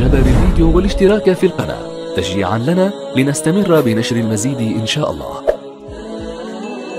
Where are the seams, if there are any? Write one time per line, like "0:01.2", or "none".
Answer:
0:05.6